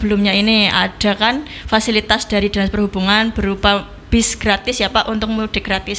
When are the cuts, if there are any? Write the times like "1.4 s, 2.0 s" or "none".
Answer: none